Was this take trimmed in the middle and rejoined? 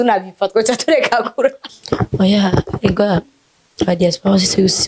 yes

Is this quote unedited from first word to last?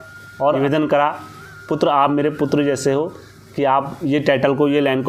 yes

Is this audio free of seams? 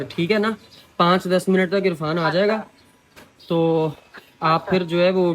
yes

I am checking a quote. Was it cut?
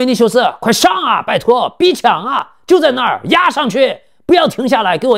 no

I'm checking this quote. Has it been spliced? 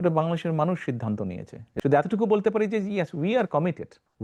yes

